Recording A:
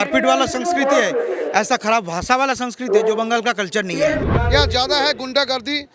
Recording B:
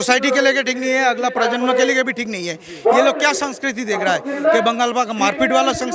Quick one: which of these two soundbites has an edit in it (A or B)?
A